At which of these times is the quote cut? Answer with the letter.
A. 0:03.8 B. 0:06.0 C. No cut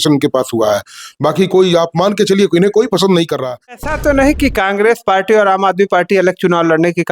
A